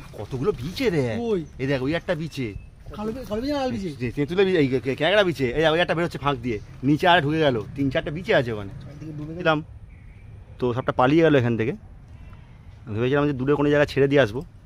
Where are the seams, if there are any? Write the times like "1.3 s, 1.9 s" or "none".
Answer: none